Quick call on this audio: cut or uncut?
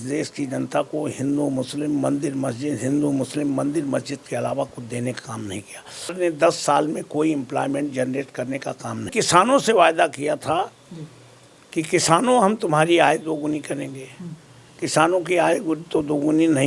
cut